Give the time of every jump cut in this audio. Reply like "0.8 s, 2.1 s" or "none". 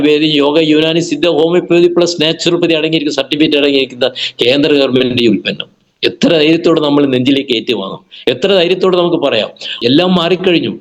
9.7 s